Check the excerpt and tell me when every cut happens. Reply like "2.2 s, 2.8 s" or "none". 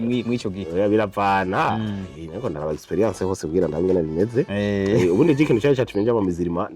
none